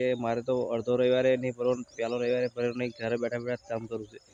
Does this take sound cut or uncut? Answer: uncut